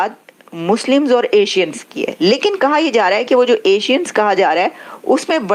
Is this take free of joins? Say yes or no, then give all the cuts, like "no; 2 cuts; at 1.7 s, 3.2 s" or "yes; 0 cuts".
yes; 0 cuts